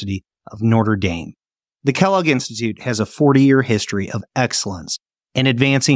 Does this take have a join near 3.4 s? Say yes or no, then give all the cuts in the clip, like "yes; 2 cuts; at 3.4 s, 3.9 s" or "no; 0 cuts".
no; 0 cuts